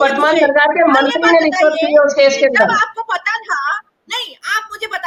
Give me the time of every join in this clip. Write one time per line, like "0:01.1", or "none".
none